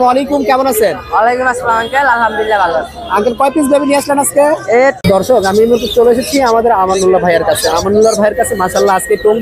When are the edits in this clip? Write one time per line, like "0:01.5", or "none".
0:05.0